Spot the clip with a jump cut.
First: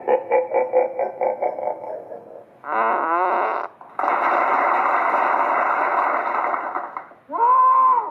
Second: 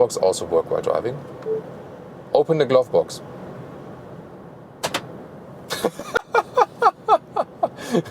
first; 1 cut; at 2.3 s

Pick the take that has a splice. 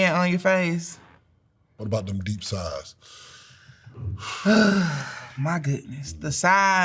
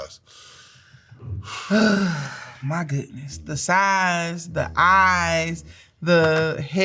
first; 1 cut; at 1.8 s

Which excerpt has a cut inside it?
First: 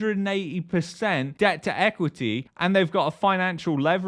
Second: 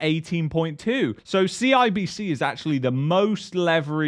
second; 1 cut; at 1.2 s

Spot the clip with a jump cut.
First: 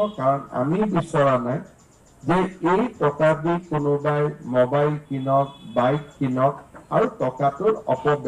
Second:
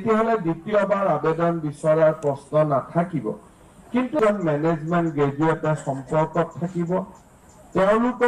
second; 1 cut; at 4.1 s

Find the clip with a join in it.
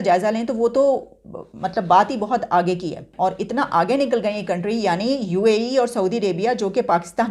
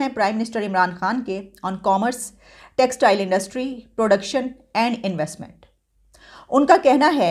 first; 1 cut; at 3.1 s

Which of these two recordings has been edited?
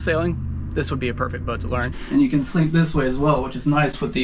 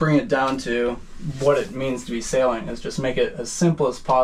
first; 1 cut; at 1.9 s

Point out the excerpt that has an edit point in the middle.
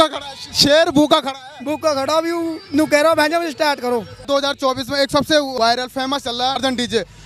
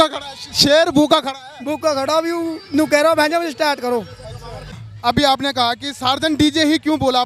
second; 1 cut; at 4.6 s

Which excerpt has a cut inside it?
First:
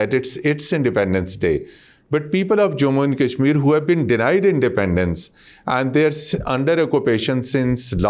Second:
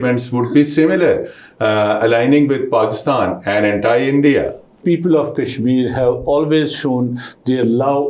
second; 1 cut; at 4.8 s

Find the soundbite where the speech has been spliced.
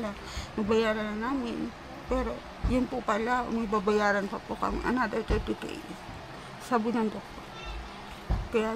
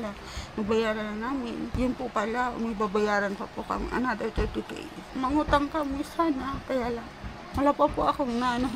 second; 3 cuts; at 1.7 s, 5.0 s, 7.4 s

